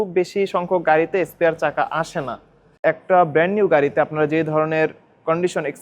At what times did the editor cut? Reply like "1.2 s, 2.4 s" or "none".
2.8 s